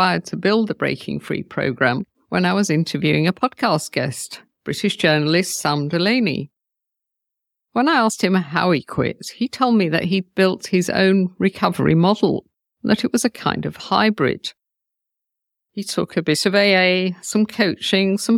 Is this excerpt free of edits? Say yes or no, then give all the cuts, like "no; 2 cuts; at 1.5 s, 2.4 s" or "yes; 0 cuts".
no; 1 cut; at 2.2 s